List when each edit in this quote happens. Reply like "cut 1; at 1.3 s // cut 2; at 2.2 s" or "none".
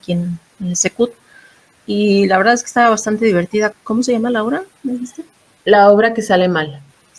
none